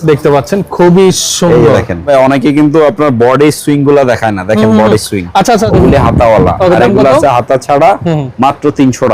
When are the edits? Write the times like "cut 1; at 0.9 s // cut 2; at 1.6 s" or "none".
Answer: cut 1; at 2.1 s // cut 2; at 5.7 s